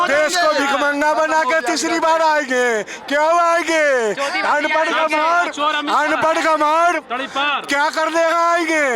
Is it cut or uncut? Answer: uncut